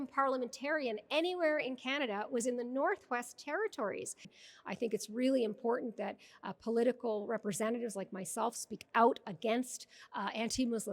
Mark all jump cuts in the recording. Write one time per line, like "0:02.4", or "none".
0:04.3